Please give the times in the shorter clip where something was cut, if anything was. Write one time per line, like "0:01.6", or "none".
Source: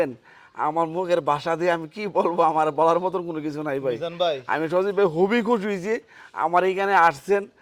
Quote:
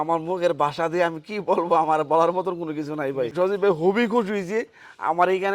0:03.3